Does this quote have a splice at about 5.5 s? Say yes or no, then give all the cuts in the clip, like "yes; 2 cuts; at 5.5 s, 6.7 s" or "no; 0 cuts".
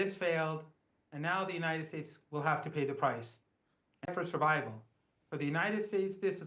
no; 1 cut; at 4.1 s